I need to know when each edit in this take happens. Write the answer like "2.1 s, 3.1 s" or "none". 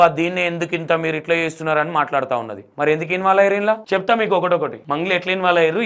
2.6 s, 3.8 s, 4.8 s